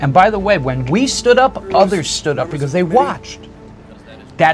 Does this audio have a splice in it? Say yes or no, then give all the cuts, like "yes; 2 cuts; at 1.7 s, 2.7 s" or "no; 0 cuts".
no; 0 cuts